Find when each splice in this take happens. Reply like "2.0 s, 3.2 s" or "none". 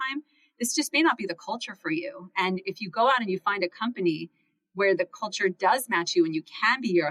none